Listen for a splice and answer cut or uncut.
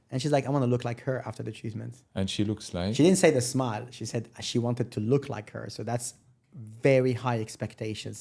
uncut